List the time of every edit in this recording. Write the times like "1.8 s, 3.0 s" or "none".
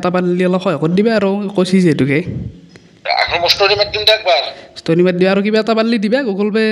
none